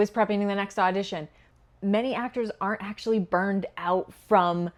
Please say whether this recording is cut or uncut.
uncut